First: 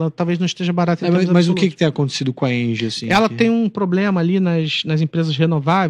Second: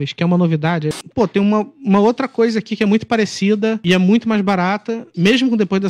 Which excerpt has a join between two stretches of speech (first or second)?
second